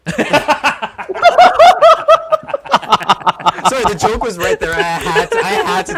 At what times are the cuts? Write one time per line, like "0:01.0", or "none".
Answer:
none